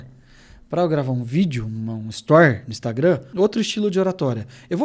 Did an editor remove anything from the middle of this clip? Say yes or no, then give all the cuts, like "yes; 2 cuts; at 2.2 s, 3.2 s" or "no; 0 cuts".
yes; 1 cut; at 3.3 s